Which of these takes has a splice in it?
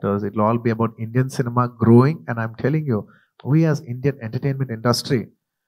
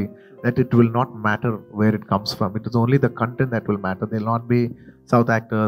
first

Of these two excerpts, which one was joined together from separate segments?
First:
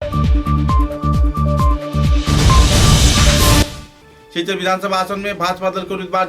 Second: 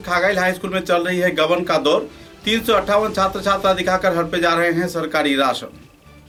first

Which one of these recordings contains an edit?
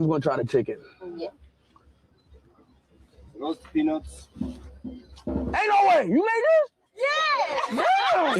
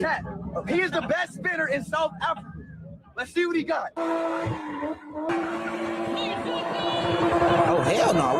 second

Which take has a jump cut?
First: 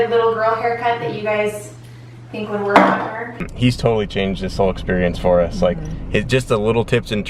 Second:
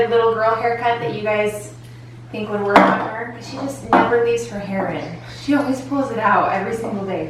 first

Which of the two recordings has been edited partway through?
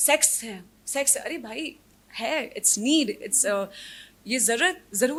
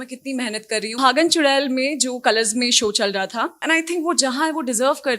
second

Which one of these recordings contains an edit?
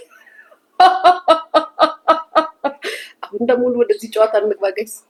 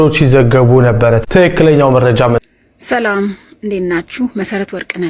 second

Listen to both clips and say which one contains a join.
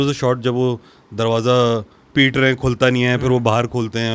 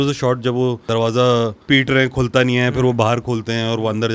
second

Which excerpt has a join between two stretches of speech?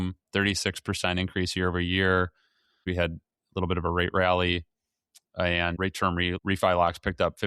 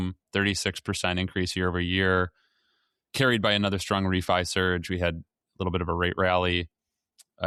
first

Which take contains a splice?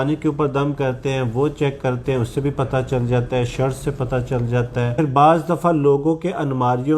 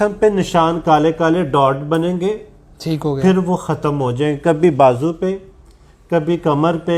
first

